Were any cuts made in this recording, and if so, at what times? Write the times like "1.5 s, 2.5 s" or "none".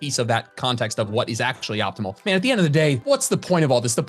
2.2 s, 3.0 s